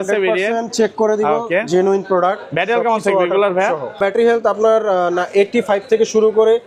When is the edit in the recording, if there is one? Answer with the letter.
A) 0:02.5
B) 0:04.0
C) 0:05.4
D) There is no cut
B